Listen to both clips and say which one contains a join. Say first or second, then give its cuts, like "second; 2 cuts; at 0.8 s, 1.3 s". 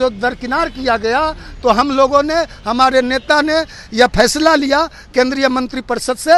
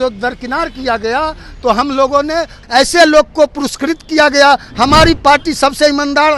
second; 1 cut; at 2.6 s